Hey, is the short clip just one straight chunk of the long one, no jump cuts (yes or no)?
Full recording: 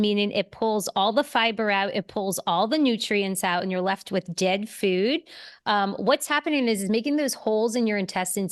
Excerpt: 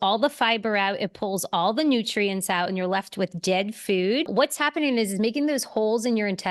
no